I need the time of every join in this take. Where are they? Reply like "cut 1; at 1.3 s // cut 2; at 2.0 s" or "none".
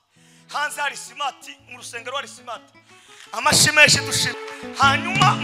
cut 1; at 4.3 s